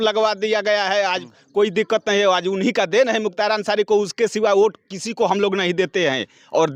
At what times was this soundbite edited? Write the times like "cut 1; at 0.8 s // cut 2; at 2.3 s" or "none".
none

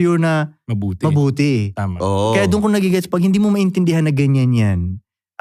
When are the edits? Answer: none

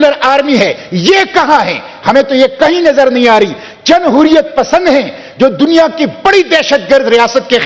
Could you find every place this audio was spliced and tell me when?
none

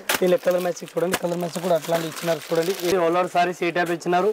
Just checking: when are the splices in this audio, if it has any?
cut 1; at 2.9 s

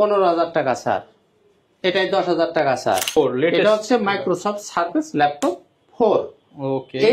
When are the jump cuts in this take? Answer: cut 1; at 3.1 s

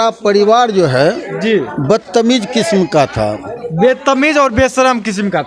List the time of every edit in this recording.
none

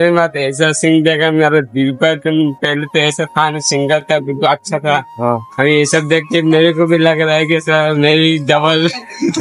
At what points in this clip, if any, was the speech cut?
none

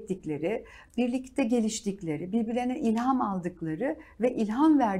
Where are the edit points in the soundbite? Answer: none

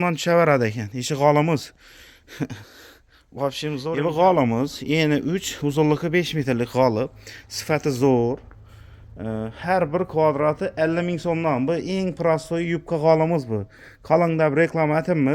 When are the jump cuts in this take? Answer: cut 1; at 3.9 s

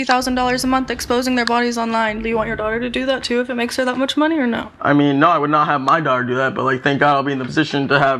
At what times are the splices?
none

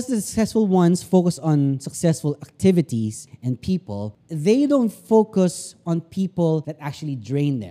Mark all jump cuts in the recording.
cut 1; at 3.3 s // cut 2; at 4.2 s // cut 3; at 6.7 s

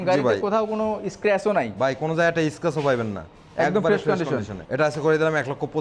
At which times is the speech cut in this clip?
none

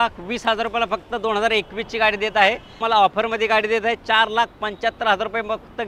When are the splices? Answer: cut 1; at 2.7 s

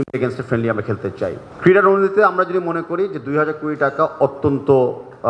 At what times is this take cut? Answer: cut 1; at 1.4 s

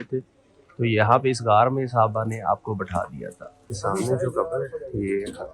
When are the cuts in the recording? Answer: cut 1; at 3.7 s

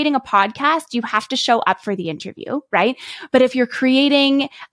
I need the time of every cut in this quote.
none

